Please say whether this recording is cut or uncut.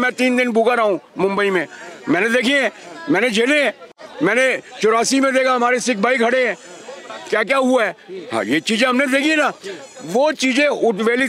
uncut